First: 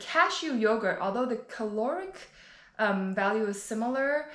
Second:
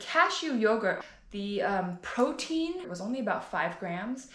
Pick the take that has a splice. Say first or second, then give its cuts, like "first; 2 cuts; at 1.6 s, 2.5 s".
second; 2 cuts; at 1.0 s, 2.9 s